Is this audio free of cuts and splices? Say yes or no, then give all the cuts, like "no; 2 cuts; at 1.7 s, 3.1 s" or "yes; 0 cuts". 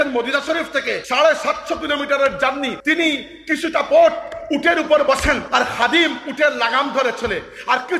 no; 3 cuts; at 1.0 s, 2.8 s, 5.4 s